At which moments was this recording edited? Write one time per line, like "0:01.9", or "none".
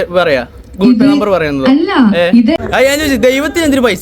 0:02.6